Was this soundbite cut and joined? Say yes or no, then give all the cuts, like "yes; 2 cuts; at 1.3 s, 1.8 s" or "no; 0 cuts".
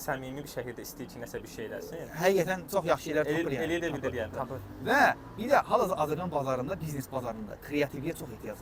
no; 0 cuts